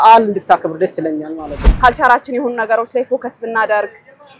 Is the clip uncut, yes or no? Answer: no